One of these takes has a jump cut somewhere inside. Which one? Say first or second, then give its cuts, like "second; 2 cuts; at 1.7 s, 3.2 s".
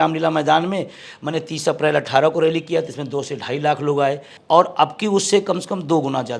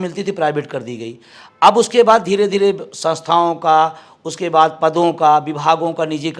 first; 1 cut; at 4.3 s